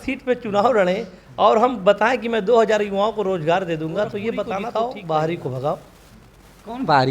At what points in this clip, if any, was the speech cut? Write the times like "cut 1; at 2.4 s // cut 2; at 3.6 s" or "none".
cut 1; at 4.7 s